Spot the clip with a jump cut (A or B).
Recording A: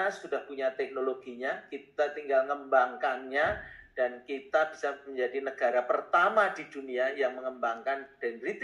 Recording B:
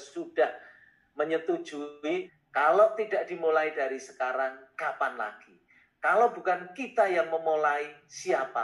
B